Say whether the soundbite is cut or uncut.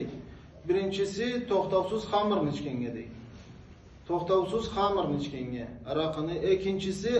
uncut